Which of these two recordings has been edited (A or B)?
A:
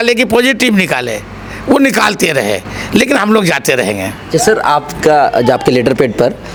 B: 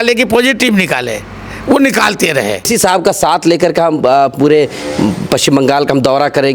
B